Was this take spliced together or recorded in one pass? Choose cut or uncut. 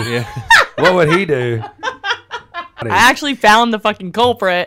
cut